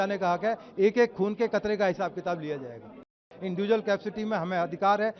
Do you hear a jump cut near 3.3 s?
yes; 1 cut; at 3.3 s

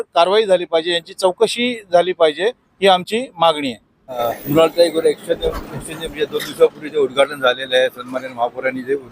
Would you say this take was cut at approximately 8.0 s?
no; 1 cut; at 4.2 s

